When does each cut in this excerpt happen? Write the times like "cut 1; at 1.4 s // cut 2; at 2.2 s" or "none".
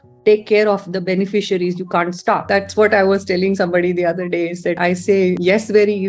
cut 1; at 2.4 s